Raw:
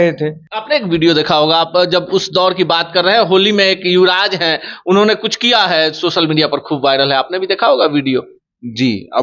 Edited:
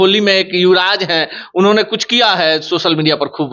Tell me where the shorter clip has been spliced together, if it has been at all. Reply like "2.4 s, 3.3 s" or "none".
none